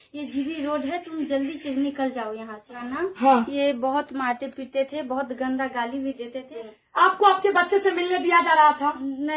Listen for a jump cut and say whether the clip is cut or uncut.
cut